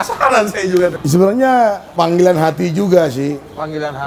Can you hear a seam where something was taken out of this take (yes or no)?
yes